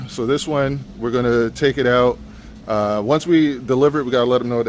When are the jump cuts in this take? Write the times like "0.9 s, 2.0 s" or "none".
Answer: none